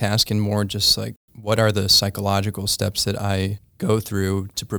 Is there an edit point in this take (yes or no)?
no